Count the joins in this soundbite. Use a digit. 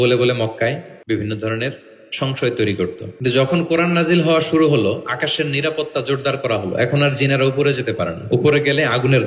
2